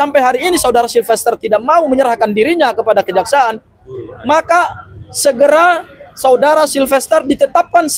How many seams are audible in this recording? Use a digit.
0